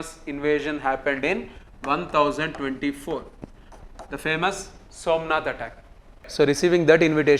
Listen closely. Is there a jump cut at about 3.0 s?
no; 1 cut; at 6.3 s

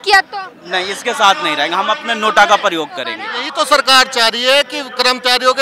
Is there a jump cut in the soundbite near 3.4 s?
yes; 1 cut; at 3.4 s

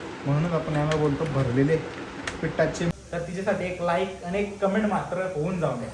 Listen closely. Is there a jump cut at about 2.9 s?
yes; 1 cut; at 2.9 s

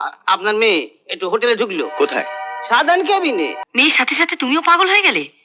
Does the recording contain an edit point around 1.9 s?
no; 1 cut; at 3.6 s

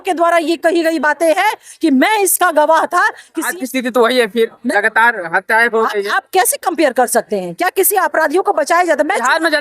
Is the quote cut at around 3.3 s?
yes; 1 cut; at 3.3 s

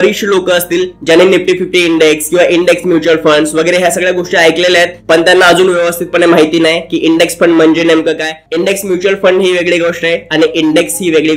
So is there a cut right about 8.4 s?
yes; 1 cut; at 8.4 s

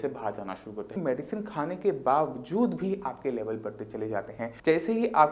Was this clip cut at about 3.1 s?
no; 2 cuts; at 0.9 s, 4.4 s

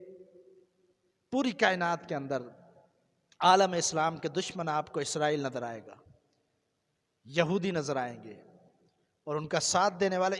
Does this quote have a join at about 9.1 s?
no; 0 cuts

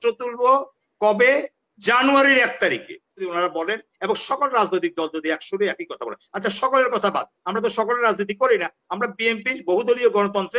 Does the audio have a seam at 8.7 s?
no; 1 cut; at 3.3 s

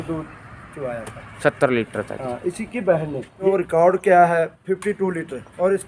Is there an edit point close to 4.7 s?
no; 1 cut; at 3.4 s

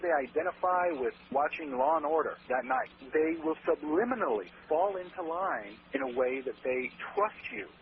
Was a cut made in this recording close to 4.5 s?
no; 1 cut; at 2.9 s

